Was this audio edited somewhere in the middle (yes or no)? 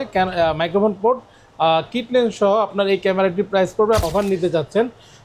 yes